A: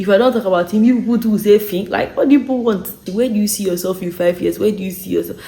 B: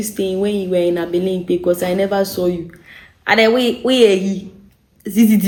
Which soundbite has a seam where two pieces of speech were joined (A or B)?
A